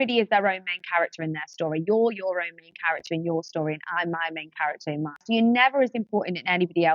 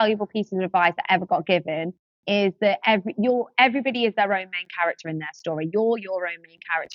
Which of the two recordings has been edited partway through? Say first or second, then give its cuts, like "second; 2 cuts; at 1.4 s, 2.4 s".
first; 1 cut; at 5.2 s